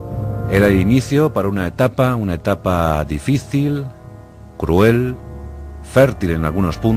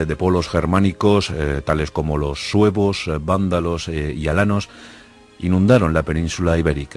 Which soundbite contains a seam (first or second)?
first